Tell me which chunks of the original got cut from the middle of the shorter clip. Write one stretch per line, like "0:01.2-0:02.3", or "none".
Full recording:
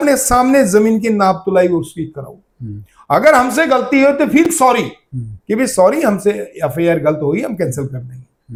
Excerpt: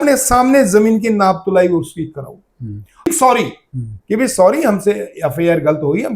0:03.1-0:04.5

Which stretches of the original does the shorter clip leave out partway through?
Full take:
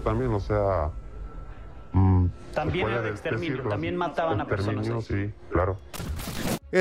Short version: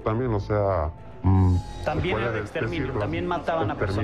0:01.0-0:01.7

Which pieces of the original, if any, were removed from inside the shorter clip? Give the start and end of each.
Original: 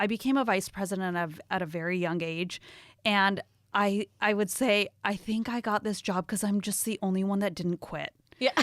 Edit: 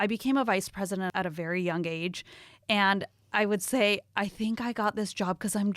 0:01.1-0:01.5
0:03.6-0:04.1

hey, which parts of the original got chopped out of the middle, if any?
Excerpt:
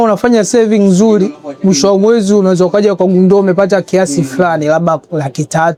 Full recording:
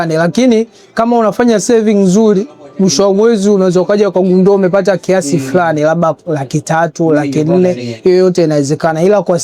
none

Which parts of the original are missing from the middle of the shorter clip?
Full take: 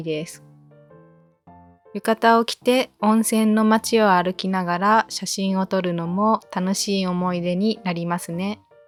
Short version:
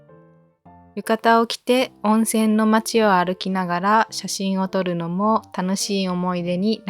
0:01.7-0:01.9

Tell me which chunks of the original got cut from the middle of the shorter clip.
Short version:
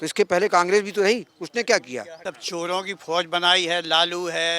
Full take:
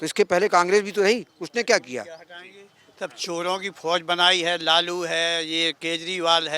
0:02.1-0:02.9

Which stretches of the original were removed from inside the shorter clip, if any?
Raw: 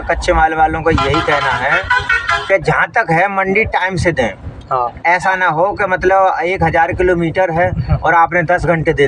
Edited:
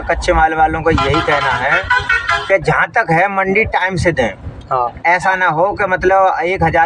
none

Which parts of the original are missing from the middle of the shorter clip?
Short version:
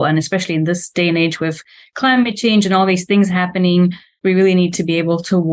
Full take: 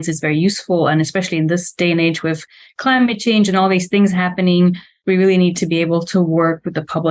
none

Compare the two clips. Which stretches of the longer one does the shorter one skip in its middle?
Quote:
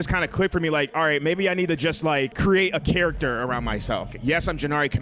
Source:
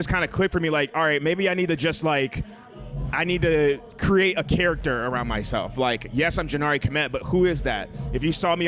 0:02.3-0:04.0
0:05.7-0:06.0

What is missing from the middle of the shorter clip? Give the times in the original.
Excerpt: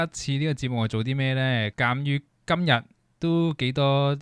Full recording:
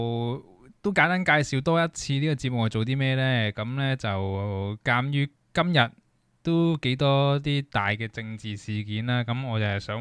0:03.5-0:04.8
0:06.1-0:06.2

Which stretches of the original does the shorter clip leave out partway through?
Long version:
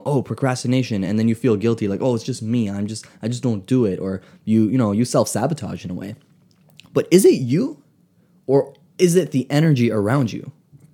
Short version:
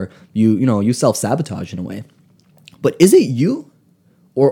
none

